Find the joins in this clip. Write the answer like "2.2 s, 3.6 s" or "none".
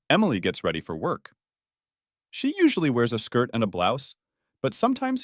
none

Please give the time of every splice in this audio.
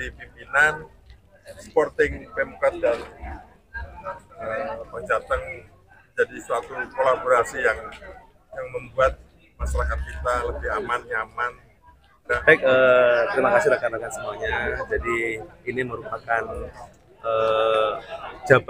12.4 s

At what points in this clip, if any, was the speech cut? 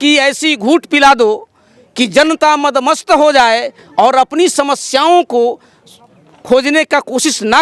none

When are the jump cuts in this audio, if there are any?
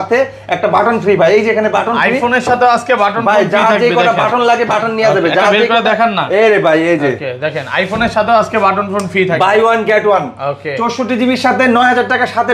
none

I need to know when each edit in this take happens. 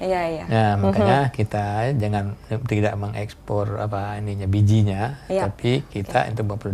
none

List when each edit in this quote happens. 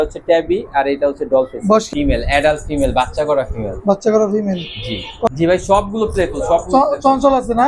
1.9 s, 5.3 s

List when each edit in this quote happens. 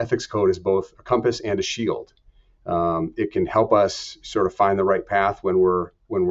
none

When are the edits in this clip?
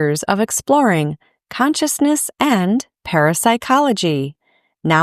none

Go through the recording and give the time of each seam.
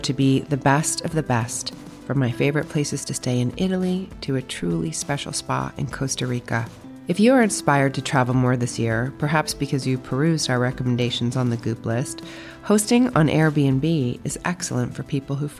none

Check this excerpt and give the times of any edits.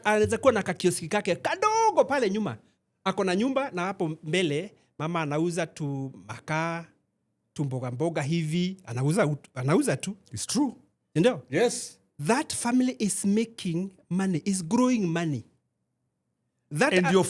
none

